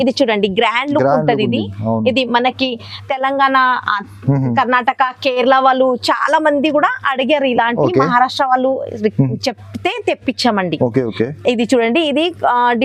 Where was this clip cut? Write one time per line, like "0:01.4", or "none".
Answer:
none